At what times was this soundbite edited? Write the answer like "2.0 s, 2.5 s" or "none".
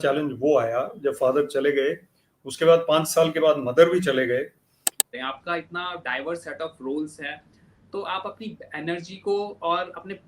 5.0 s

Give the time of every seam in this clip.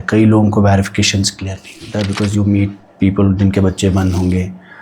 1.9 s

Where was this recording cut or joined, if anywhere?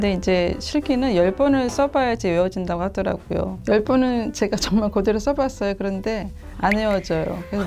3.5 s

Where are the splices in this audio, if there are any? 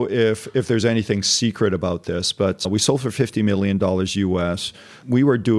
none

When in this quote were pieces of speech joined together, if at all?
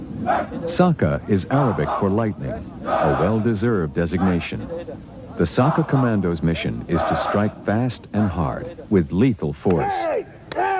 4.6 s

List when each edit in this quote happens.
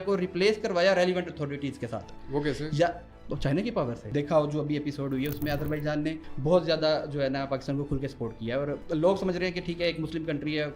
4.0 s, 6.3 s, 8.8 s

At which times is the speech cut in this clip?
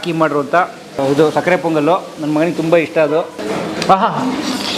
1.0 s, 3.4 s

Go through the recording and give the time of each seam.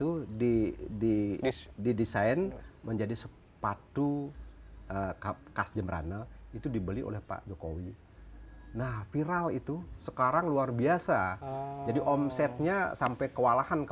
none

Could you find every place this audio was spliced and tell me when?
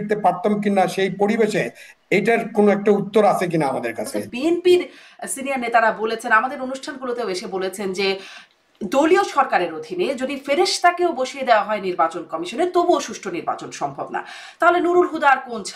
4.3 s

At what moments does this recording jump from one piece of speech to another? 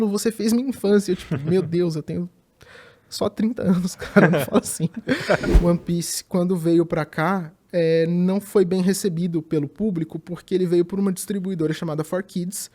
5.5 s

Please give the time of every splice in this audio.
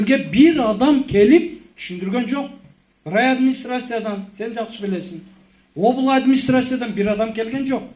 none

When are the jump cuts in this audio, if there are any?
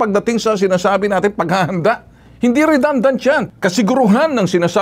3.5 s

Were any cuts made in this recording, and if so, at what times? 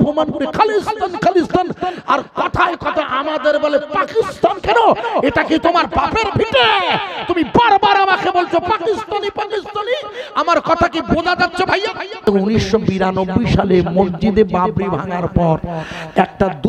12.2 s

